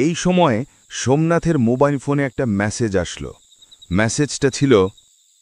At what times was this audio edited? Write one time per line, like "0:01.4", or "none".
none